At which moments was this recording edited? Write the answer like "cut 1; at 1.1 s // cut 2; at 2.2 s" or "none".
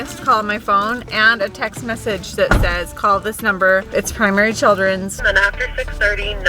cut 1; at 3.9 s // cut 2; at 5.2 s

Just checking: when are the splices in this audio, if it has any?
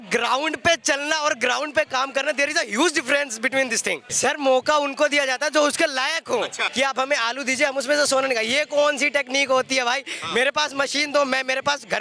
cut 1; at 4.1 s // cut 2; at 6.6 s

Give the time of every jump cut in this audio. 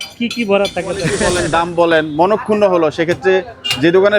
cut 1; at 1.2 s

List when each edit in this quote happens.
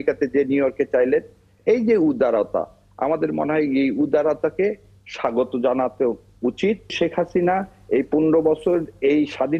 cut 1; at 6.9 s

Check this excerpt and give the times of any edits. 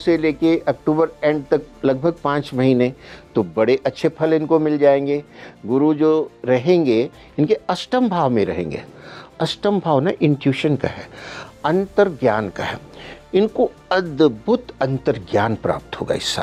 none

